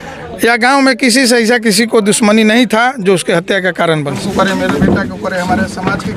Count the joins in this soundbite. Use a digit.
1